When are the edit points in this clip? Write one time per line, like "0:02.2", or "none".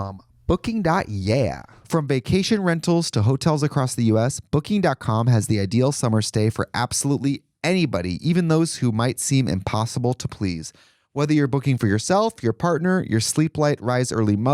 0:01.7

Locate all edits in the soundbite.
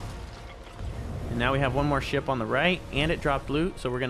0:01.3

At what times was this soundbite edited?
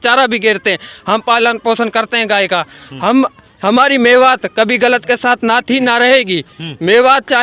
none

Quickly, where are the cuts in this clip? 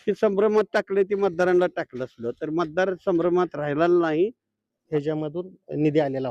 0:04.8

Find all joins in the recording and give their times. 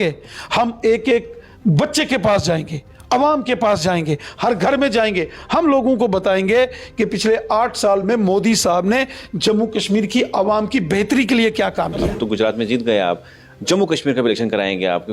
0:12.1

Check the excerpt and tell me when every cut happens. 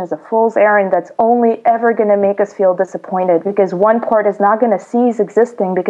none

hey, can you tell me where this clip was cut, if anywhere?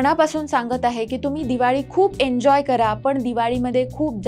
none

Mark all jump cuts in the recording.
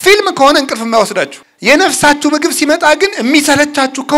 0:01.4

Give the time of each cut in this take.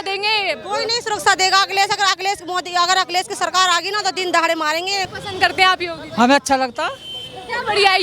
0:05.1

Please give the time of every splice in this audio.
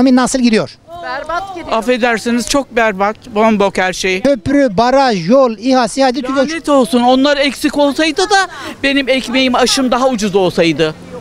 0:04.2

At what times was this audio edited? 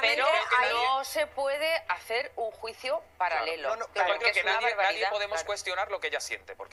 none

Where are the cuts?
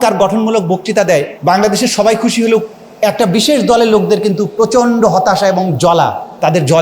0:01.3
0:05.7

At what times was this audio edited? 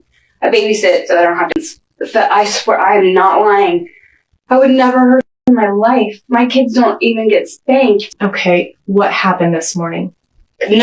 0:01.6
0:08.1

